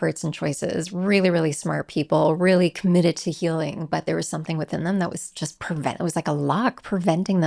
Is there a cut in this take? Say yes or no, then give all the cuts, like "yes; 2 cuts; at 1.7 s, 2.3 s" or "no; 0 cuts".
no; 0 cuts